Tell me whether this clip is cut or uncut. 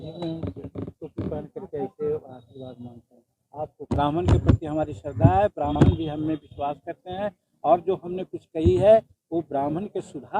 cut